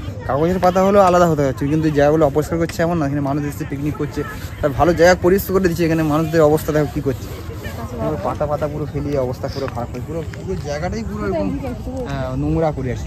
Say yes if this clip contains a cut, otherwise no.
no